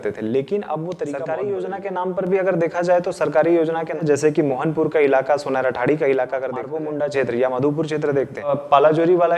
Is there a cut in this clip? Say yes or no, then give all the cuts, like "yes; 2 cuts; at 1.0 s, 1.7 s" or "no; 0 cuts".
yes; 4 cuts; at 1.2 s, 4.0 s, 6.7 s, 8.5 s